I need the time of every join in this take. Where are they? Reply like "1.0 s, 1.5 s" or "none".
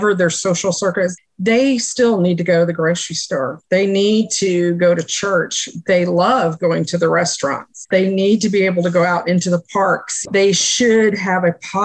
1.3 s, 7.7 s